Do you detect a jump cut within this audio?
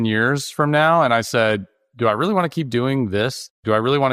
no; 0 cuts

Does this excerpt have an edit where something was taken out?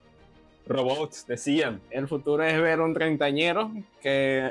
yes; 1 cut; at 1.8 s

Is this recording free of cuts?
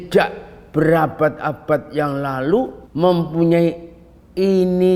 no; 1 cut; at 2.8 s

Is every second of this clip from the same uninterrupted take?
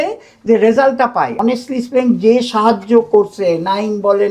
no; 1 cut; at 1.4 s

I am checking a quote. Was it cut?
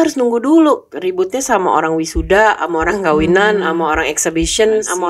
no; 0 cuts

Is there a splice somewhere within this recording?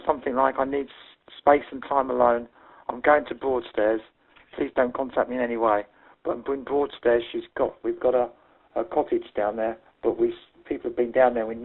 no; 0 cuts

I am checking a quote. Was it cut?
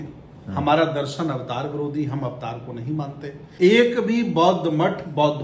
yes; 1 cut; at 3.4 s

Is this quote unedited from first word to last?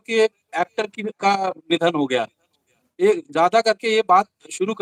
yes; 0 cuts

